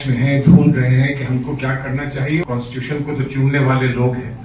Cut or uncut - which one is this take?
cut